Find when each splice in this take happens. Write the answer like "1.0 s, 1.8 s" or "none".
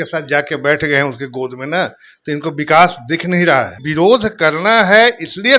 3.8 s